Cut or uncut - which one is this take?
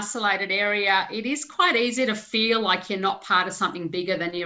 uncut